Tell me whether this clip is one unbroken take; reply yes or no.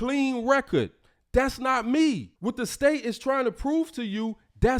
no